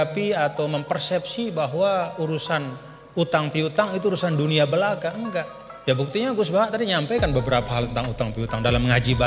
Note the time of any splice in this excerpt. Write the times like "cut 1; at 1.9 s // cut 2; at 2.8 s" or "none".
none